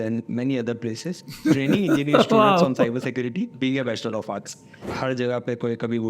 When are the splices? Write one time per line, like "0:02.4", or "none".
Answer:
0:04.8